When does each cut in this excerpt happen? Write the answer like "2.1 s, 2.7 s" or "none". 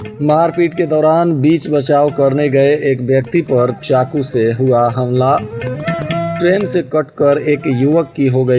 none